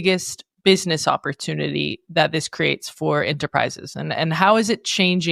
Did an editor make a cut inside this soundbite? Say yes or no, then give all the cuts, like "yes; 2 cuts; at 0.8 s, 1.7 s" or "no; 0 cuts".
no; 0 cuts